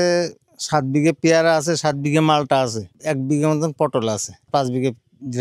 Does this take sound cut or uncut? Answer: cut